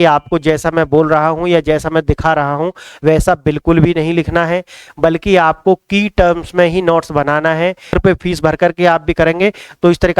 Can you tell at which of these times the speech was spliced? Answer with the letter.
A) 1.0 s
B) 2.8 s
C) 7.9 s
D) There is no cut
C